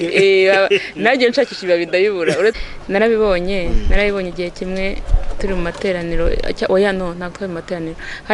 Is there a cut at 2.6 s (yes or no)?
yes